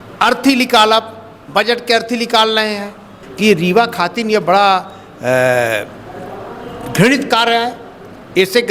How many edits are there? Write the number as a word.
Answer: one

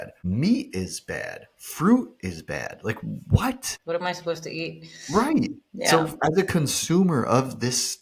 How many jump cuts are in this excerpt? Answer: zero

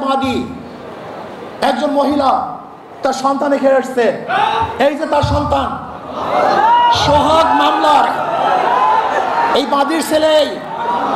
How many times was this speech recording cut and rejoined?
zero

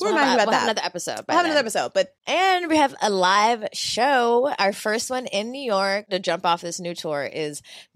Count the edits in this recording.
two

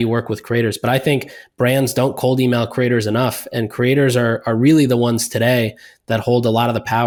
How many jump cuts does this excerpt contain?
zero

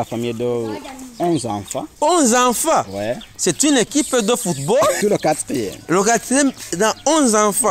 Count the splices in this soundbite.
one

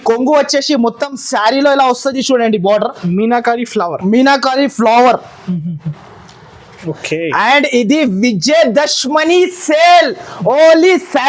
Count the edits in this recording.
zero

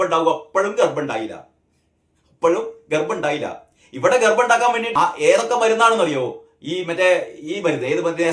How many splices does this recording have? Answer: one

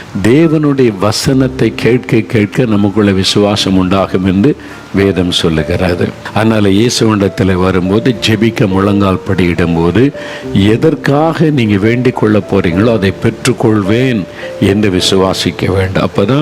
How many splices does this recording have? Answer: one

